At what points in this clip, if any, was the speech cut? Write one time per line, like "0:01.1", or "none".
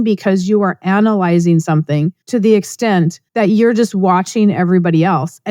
0:02.2
0:03.2